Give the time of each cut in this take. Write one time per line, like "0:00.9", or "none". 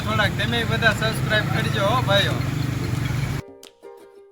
0:03.4